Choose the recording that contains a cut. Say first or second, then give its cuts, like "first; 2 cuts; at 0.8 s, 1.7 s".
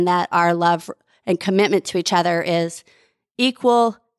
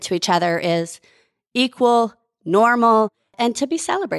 second; 1 cut; at 3.3 s